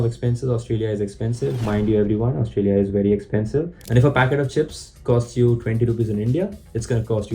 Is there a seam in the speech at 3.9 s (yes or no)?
yes